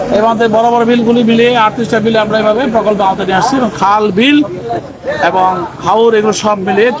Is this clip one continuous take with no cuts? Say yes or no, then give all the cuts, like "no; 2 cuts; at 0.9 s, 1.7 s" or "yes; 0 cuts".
yes; 0 cuts